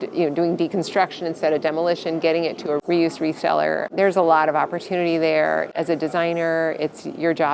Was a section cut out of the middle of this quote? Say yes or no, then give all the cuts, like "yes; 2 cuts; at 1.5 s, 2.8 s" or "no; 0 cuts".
yes; 3 cuts; at 2.8 s, 3.9 s, 5.7 s